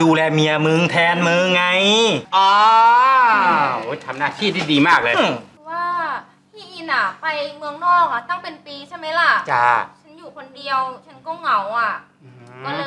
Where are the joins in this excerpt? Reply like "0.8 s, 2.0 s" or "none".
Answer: 5.5 s